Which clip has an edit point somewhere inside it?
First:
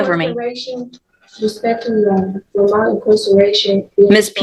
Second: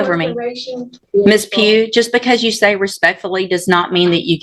second; 1 cut; at 1.0 s

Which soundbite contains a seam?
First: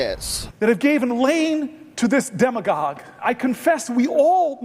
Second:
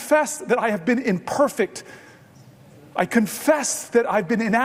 first; 1 cut; at 3.2 s

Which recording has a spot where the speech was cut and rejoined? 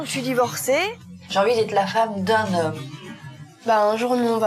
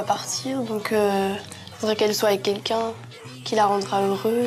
first; 2 cuts; at 1.1 s, 3.0 s

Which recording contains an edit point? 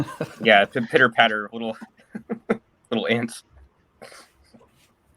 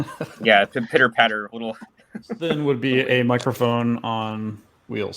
second; 1 cut; at 2.5 s

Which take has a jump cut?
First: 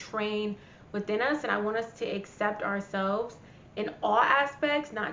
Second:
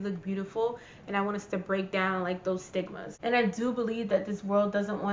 second; 1 cut; at 3.0 s

